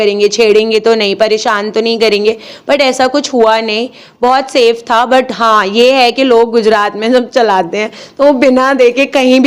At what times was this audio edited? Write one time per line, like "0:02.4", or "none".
none